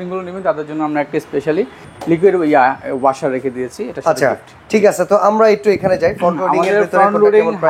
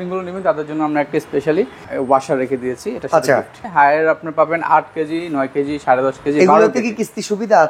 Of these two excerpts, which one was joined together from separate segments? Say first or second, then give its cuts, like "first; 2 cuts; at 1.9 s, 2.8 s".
second; 2 cuts; at 1.9 s, 3.6 s